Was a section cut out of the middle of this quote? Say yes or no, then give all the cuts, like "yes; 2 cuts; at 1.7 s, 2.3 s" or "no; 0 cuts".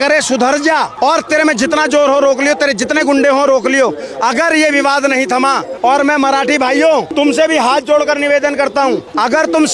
yes; 2 cuts; at 0.9 s, 5.7 s